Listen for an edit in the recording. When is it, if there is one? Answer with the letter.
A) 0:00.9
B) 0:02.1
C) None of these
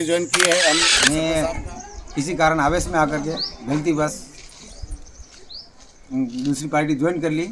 A